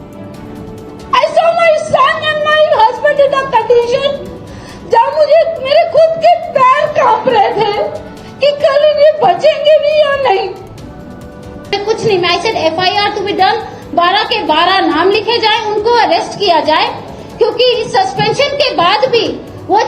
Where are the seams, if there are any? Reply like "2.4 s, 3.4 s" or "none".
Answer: 11.7 s